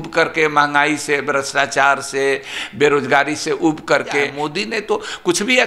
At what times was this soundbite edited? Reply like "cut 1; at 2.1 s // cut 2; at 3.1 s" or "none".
cut 1; at 4.3 s